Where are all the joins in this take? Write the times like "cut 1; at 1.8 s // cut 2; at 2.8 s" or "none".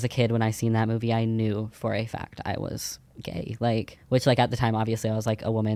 cut 1; at 3.9 s